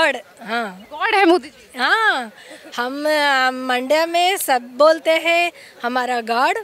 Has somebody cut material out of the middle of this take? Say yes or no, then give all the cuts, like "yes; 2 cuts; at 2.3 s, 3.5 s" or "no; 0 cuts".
no; 0 cuts